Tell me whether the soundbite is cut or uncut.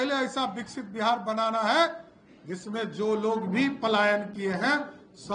uncut